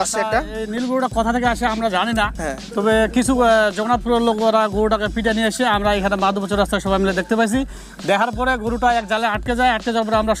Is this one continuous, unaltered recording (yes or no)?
yes